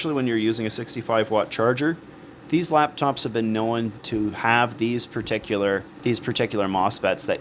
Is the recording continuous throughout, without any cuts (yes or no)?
no